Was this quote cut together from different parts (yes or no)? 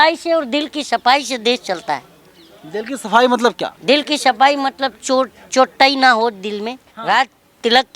yes